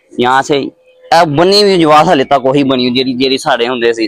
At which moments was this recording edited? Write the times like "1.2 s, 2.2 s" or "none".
none